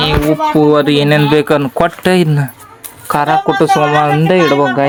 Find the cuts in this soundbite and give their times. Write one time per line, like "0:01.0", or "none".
none

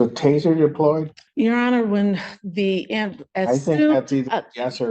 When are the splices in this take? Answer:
0:01.2

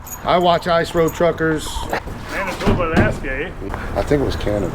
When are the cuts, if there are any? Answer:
0:02.0
0:03.6

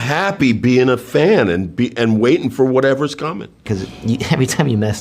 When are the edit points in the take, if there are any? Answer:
0:03.6

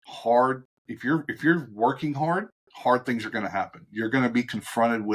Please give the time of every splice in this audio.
none

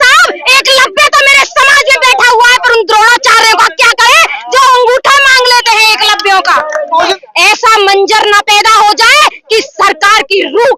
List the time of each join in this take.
0:07.1

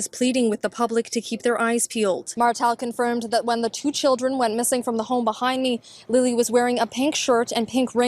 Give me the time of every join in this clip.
0:02.3

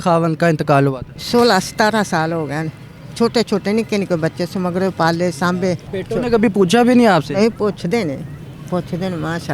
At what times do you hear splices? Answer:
0:01.1
0:05.9

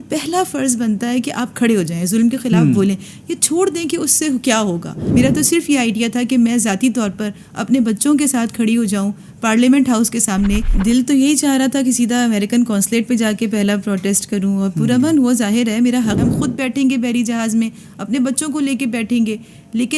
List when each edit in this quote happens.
0:05.0
0:10.8
0:16.2

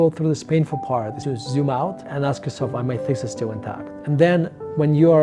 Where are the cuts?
0:01.2
0:03.9

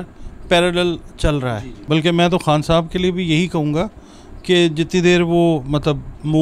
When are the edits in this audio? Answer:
0:01.8

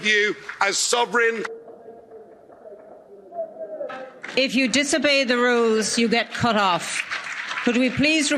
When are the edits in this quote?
none

